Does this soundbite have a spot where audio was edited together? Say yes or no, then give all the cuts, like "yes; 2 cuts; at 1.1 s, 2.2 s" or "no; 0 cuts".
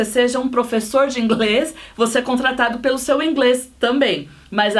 no; 0 cuts